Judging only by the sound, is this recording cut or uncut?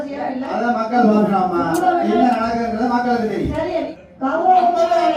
cut